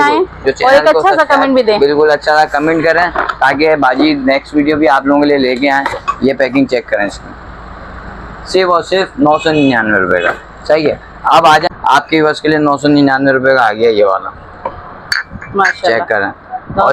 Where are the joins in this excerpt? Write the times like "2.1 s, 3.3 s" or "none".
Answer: 11.7 s